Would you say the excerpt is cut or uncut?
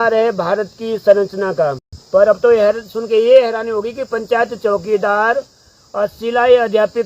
cut